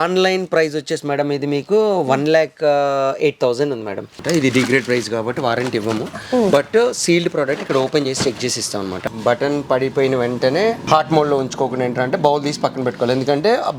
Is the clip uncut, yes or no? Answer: no